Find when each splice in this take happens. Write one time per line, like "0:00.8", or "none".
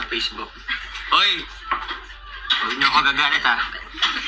none